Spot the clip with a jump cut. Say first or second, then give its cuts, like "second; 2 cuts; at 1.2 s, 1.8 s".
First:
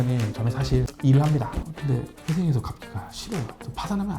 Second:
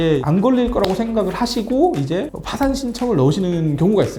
first; 1 cut; at 1.6 s